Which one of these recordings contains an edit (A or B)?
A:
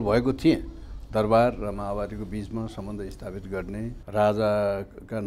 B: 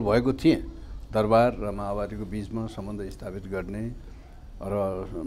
A